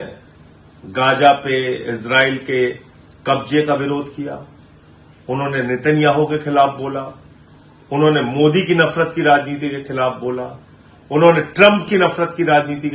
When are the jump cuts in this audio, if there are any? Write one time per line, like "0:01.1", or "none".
none